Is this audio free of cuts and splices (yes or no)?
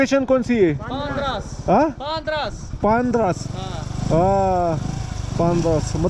yes